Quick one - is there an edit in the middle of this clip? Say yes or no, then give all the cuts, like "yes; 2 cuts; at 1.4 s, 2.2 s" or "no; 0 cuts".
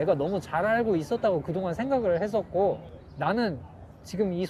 no; 0 cuts